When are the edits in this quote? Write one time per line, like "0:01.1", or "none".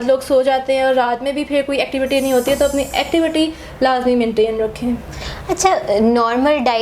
none